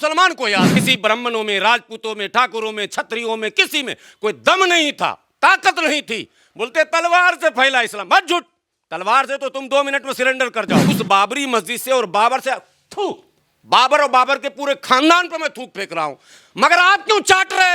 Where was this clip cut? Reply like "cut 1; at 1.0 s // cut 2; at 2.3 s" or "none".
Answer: cut 1; at 0.8 s // cut 2; at 10.9 s